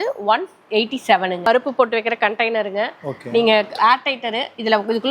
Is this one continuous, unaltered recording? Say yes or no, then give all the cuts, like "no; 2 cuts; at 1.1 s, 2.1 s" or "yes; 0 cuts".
no; 1 cut; at 1.5 s